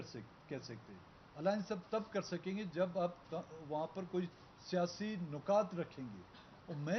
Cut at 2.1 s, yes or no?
yes